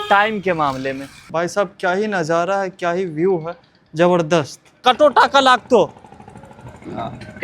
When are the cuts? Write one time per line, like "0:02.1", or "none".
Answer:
0:01.3
0:04.8